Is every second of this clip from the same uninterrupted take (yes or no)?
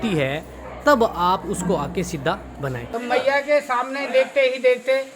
no